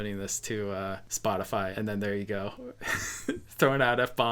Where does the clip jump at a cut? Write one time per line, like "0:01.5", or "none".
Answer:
0:01.7